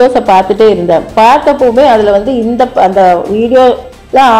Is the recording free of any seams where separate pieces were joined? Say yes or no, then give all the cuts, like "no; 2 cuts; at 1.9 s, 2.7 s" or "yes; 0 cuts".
yes; 0 cuts